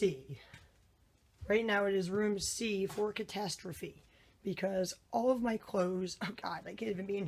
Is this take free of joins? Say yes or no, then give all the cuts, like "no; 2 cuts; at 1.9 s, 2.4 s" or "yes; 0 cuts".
yes; 0 cuts